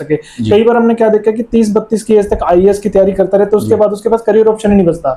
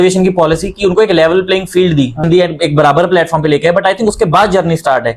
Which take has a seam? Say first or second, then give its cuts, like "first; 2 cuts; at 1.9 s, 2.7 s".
second; 1 cut; at 2.2 s